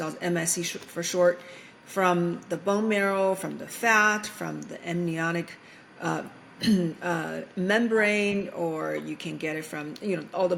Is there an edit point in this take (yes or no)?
no